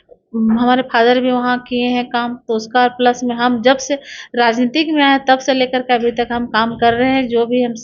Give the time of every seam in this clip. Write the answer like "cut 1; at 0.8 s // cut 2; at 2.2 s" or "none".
none

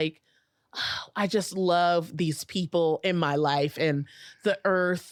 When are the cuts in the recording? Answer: none

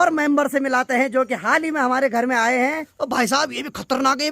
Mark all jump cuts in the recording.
cut 1; at 2.9 s

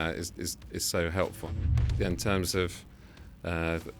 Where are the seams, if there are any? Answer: cut 1; at 1.7 s

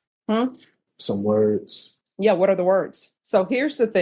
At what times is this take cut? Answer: cut 1; at 3.1 s

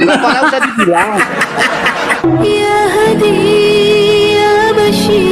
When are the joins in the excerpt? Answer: cut 1; at 2.2 s

